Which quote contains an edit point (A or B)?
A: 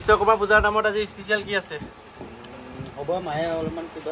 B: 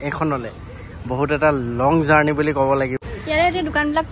B